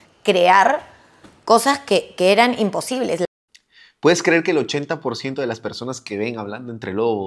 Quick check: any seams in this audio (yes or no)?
no